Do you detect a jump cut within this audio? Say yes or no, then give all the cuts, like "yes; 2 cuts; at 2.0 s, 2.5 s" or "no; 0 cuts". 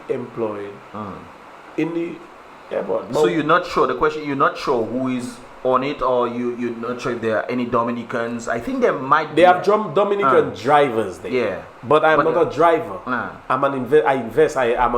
no; 0 cuts